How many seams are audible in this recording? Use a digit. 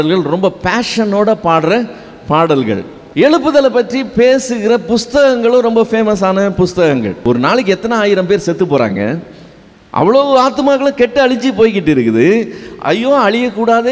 2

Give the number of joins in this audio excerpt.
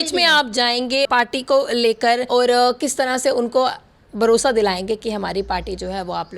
2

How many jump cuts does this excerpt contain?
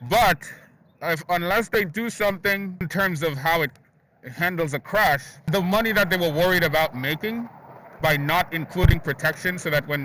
2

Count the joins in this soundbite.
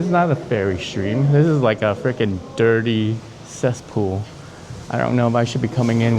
0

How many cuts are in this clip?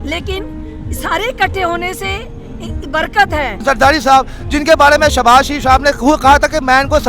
1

